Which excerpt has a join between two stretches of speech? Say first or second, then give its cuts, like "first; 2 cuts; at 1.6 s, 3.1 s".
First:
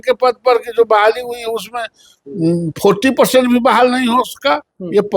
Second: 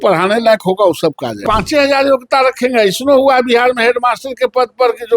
second; 1 cut; at 1.4 s